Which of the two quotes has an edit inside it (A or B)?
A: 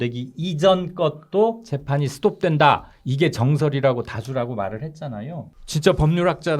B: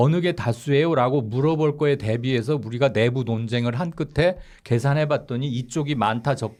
A